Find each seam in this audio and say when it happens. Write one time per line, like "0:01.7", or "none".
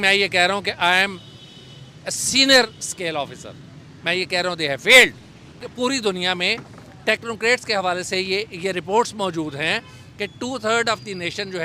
0:05.7